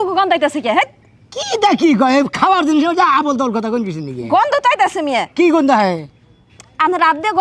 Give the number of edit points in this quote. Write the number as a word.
zero